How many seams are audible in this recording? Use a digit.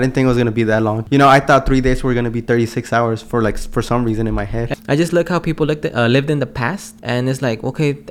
3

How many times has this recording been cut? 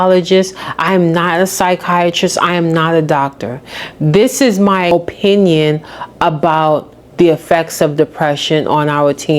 1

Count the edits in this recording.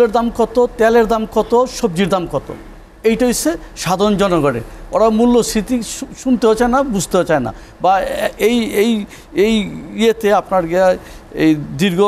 0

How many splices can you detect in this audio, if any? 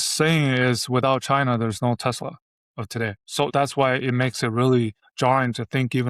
2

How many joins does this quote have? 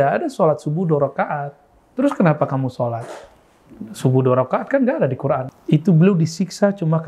1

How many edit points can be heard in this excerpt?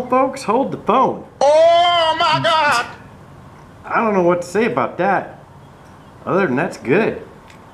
2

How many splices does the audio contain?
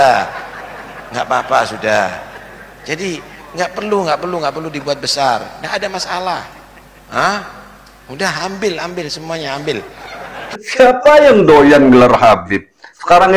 1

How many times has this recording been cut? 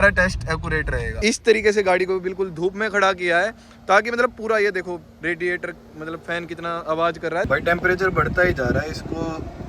2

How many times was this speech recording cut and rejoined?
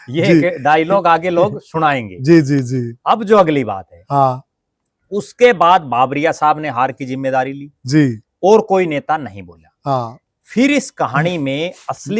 0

